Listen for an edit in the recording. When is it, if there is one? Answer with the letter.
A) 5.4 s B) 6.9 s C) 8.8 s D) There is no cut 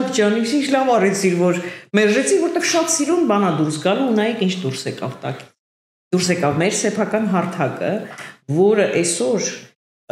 D